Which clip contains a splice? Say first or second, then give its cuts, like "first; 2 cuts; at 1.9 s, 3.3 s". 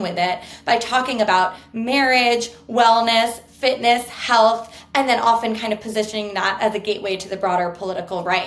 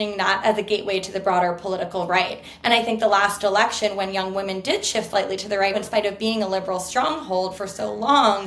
second; 1 cut; at 5.8 s